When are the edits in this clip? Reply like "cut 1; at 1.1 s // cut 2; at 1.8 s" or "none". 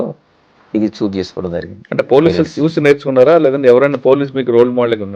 cut 1; at 1.8 s